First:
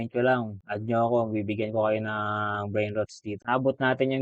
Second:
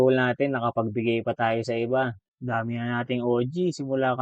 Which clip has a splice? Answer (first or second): first